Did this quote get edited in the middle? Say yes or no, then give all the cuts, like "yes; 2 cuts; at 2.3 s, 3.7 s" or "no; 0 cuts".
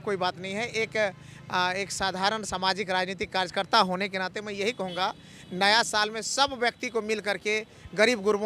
no; 0 cuts